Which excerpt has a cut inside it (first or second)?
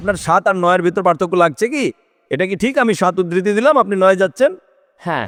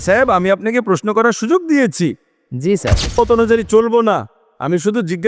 second